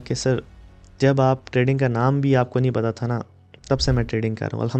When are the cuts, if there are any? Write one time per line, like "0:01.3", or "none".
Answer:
none